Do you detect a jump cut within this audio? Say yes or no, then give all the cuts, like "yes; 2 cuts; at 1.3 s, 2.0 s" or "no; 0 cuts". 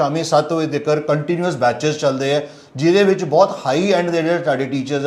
no; 0 cuts